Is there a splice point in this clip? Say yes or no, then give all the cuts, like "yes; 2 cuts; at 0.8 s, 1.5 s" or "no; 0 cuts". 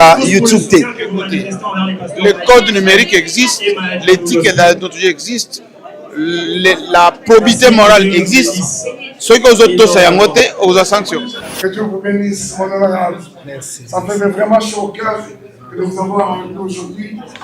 yes; 1 cut; at 11.3 s